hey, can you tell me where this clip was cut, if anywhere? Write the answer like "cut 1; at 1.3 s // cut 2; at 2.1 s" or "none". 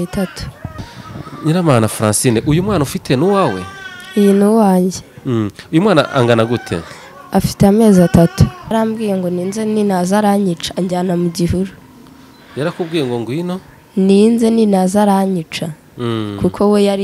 cut 1; at 1.0 s // cut 2; at 8.7 s